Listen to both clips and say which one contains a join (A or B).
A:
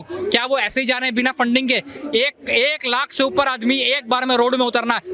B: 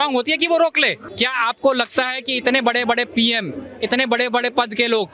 B